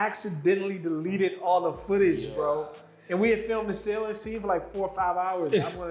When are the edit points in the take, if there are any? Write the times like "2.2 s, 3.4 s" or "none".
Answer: none

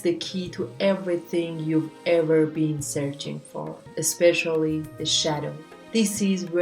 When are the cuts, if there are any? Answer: 3.8 s

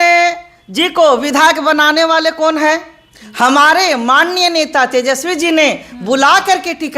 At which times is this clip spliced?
none

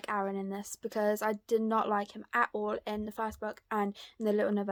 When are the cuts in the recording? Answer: none

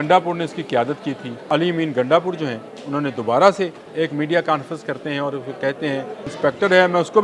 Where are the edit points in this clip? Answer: 1.5 s, 3.8 s, 6.3 s

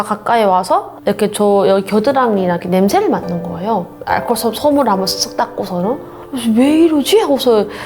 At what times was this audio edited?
0.9 s, 6.1 s

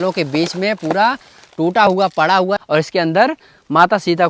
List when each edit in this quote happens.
2.6 s

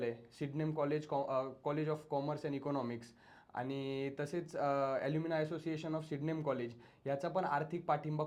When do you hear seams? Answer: none

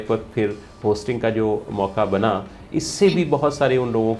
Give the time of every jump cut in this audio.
none

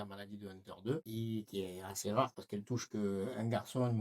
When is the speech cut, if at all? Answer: 1.1 s

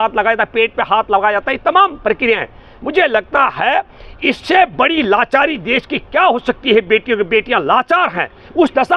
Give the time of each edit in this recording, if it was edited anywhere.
none

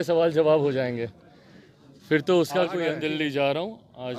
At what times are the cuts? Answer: 3.0 s

